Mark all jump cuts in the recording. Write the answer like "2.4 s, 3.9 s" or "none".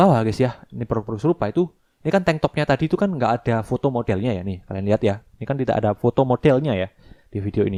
none